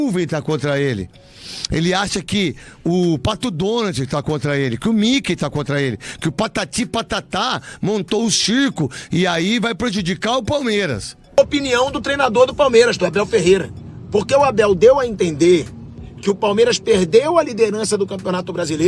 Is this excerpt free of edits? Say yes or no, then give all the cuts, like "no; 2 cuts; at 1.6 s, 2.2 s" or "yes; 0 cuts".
no; 1 cut; at 11.4 s